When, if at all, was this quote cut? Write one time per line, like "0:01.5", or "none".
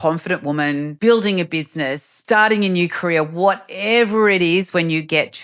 0:00.9
0:02.1